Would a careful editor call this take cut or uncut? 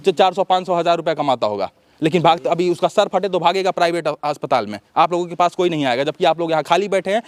uncut